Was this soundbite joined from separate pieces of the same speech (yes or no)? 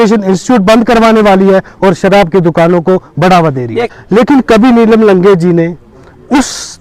yes